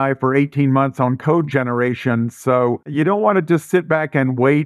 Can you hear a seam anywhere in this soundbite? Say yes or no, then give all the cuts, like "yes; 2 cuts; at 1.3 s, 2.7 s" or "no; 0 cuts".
yes; 1 cut; at 2.8 s